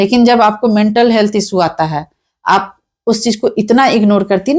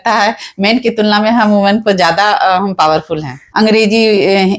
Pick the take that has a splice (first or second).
second